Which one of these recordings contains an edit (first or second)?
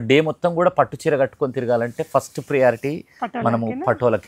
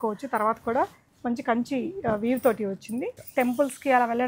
second